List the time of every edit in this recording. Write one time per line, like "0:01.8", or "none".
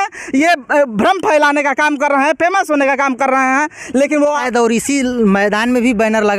0:04.4